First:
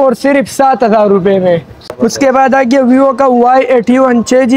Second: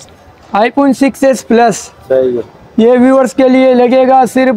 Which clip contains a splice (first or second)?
first